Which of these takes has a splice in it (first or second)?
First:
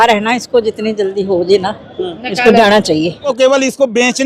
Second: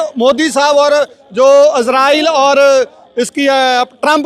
first